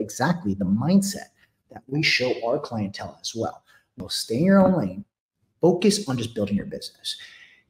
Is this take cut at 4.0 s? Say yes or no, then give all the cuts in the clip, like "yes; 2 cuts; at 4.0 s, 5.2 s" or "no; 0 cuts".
yes; 1 cut; at 4.0 s